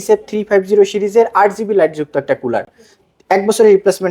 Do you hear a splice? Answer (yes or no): no